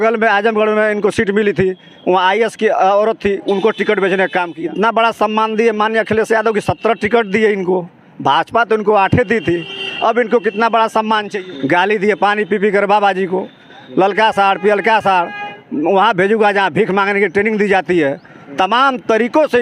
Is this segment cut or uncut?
cut